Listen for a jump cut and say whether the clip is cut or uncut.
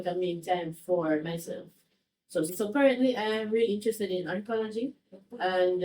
cut